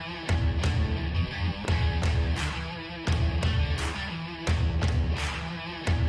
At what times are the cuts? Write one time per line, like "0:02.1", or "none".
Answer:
0:01.6